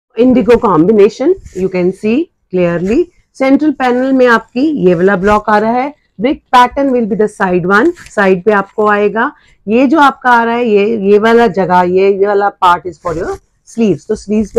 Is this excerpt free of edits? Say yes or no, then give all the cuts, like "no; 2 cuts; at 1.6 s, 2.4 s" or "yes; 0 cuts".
yes; 0 cuts